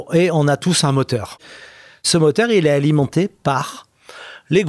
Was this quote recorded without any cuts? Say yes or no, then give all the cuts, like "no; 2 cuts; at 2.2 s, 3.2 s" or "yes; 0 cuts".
no; 1 cut; at 1.6 s